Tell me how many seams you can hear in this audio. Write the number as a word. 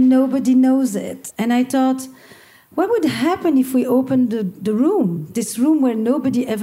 one